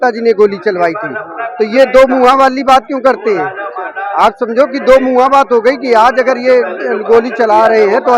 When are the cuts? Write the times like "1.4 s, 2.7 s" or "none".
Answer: none